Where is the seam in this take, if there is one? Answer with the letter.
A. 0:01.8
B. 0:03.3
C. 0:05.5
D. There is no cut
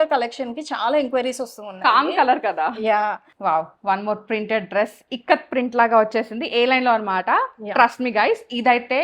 B